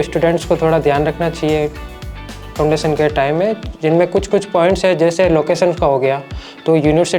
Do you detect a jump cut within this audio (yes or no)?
no